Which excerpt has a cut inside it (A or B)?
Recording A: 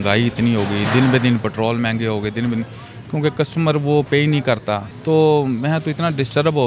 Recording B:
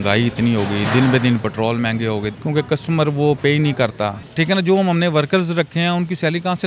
B